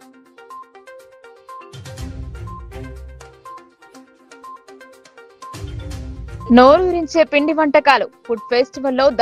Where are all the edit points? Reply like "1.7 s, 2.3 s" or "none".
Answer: 1.6 s